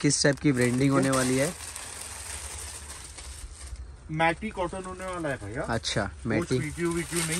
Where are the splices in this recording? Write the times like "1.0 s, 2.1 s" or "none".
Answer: none